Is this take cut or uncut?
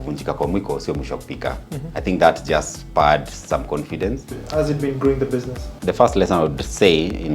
cut